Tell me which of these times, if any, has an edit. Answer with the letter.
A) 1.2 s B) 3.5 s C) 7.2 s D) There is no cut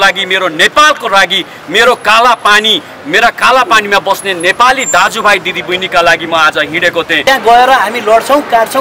C